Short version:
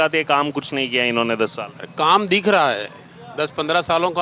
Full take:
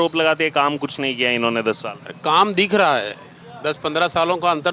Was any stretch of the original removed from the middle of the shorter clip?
no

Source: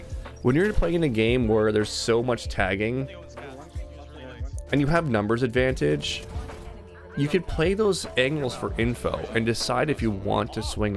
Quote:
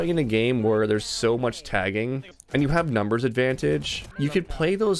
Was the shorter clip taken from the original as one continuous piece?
no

